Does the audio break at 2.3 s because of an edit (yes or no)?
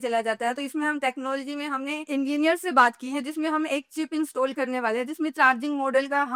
no